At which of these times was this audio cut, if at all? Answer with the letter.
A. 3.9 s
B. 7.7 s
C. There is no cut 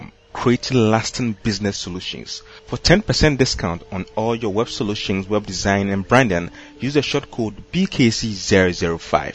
C